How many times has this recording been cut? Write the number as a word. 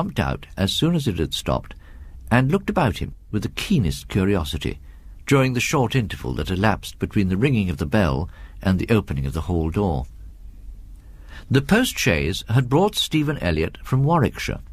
one